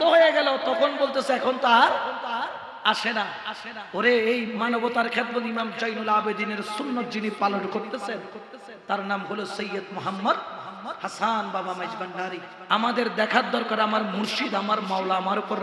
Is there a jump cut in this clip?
yes; 1 cut; at 12.5 s

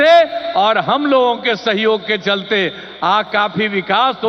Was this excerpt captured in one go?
yes; 0 cuts

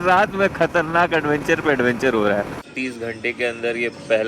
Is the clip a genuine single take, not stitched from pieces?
no; 1 cut; at 2.7 s

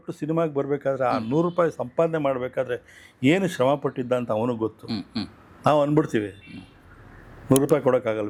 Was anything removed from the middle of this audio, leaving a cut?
no; 0 cuts

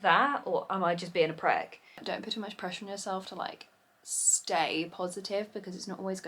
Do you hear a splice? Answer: yes; 1 cut; at 2.0 s

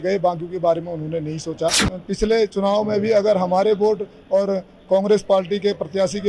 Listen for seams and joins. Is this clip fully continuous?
no; 1 cut; at 1.9 s

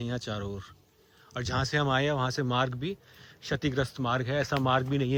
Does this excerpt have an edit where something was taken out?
no; 0 cuts

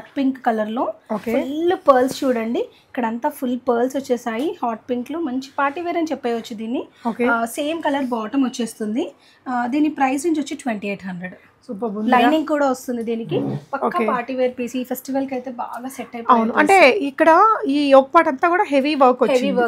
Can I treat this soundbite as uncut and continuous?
yes; 0 cuts

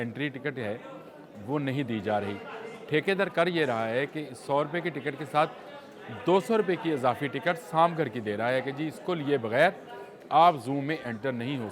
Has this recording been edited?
no; 0 cuts

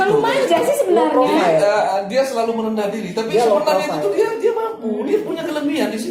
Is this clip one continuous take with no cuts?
yes; 0 cuts

